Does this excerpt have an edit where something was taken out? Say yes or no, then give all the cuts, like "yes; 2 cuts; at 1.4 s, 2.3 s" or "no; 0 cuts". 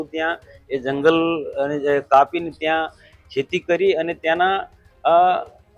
no; 0 cuts